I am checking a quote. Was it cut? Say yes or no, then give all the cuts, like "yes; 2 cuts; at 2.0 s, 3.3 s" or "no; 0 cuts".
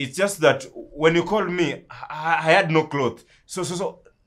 no; 0 cuts